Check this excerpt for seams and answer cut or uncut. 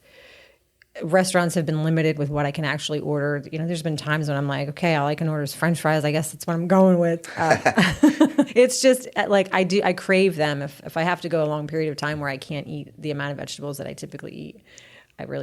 cut